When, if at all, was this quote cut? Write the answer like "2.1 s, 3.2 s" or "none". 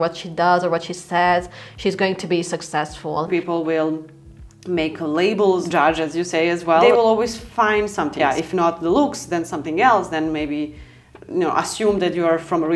3.3 s, 5.7 s, 6.8 s, 8.2 s